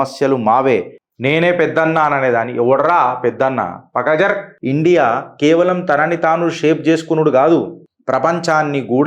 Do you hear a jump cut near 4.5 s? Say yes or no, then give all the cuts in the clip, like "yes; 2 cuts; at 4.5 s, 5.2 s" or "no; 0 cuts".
yes; 2 cuts; at 1.0 s, 4.5 s